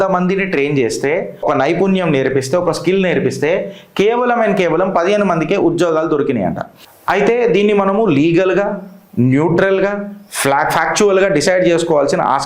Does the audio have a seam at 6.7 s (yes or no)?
yes